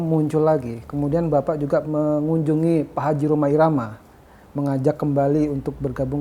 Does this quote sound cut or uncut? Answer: cut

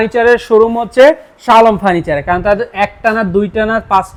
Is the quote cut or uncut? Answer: uncut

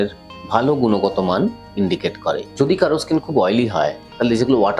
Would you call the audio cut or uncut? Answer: cut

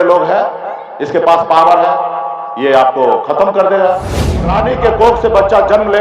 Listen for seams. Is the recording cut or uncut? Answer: cut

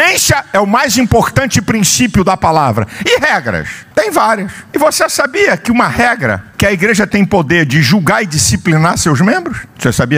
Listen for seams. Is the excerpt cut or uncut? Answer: uncut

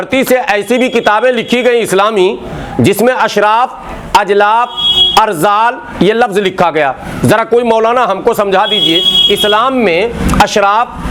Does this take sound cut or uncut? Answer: uncut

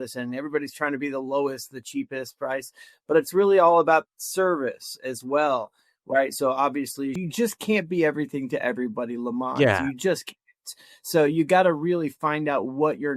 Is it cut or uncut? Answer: cut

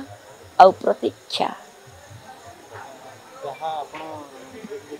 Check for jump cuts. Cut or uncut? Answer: uncut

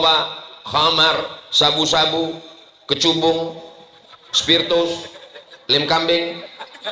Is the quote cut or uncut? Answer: uncut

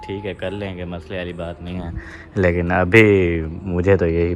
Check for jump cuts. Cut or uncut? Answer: uncut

